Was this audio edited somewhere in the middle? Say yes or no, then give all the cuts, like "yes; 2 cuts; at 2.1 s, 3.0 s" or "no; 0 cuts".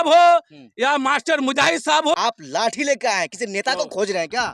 yes; 1 cut; at 2.1 s